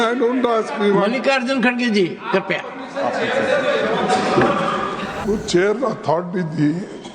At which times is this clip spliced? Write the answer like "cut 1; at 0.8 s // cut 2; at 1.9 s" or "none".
cut 1; at 5.2 s